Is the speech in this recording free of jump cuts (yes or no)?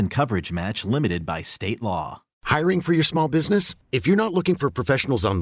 no